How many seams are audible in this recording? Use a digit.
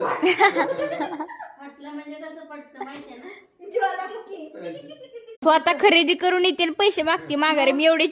1